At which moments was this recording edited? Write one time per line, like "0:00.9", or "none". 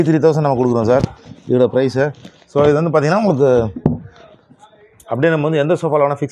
none